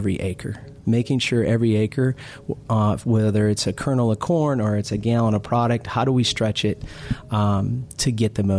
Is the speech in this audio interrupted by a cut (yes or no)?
no